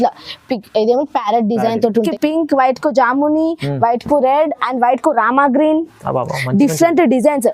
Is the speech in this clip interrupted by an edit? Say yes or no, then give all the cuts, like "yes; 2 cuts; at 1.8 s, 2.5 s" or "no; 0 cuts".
yes; 1 cut; at 2.1 s